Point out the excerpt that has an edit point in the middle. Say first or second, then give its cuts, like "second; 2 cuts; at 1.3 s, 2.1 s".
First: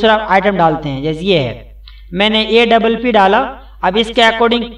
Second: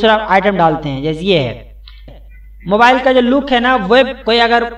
second; 1 cut; at 2.1 s